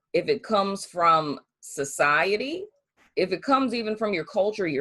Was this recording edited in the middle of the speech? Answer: yes; 1 cut; at 3.1 s

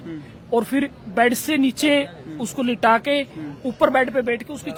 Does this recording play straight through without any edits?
yes; 0 cuts

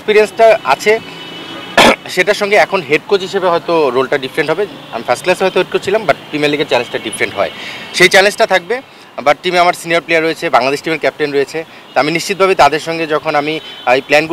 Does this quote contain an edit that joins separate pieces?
no; 0 cuts

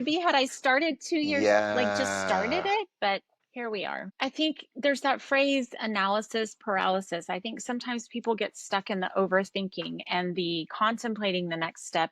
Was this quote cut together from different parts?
yes; 1 cut; at 3.9 s

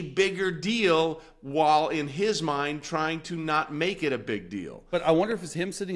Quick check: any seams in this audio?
yes; 1 cut; at 4.8 s

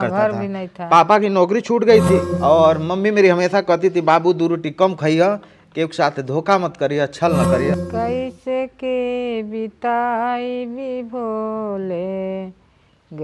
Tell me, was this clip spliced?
yes; 2 cuts; at 2.3 s, 7.8 s

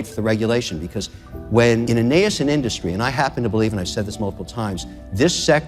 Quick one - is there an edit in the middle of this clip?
yes; 1 cut; at 1.9 s

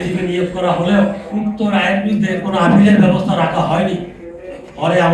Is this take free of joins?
no; 1 cut; at 1.2 s

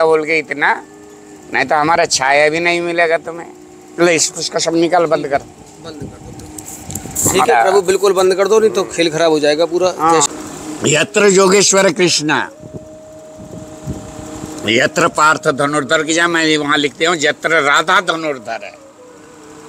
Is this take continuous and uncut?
no; 1 cut; at 10.3 s

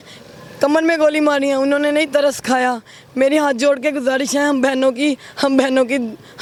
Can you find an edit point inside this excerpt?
no; 0 cuts

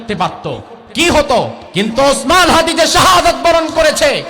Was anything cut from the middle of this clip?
yes; 1 cut; at 1.6 s

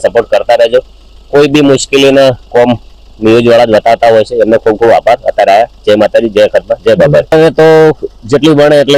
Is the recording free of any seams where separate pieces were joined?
yes; 0 cuts

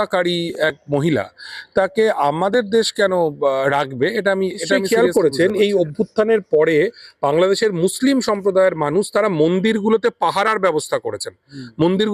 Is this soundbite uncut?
no; 1 cut; at 4.8 s

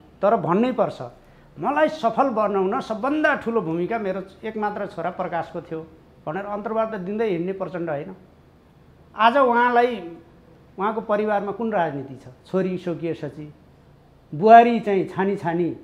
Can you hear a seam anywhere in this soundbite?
no; 0 cuts

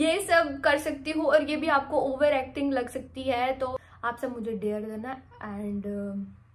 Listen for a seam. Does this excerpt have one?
yes; 1 cut; at 3.8 s

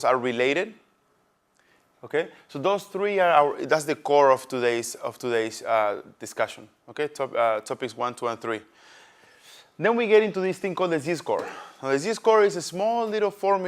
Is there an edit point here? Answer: yes; 1 cut; at 11.0 s

